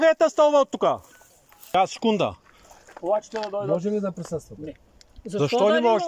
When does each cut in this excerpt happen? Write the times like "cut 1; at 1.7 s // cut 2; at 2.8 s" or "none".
cut 1; at 1.7 s